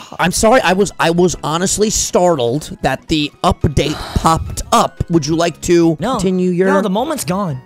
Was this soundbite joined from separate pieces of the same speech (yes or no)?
yes